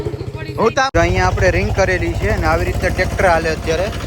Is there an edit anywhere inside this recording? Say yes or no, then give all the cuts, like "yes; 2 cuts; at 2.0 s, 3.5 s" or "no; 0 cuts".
yes; 1 cut; at 0.9 s